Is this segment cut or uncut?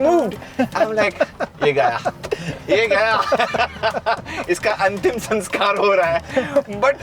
cut